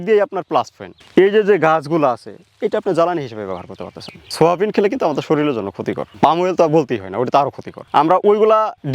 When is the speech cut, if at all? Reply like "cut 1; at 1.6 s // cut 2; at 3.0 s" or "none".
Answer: cut 1; at 4.3 s // cut 2; at 7.8 s